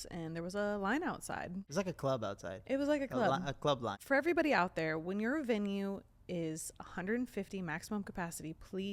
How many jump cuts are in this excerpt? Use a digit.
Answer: 2